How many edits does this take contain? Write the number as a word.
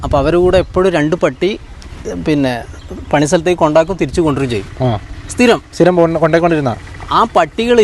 zero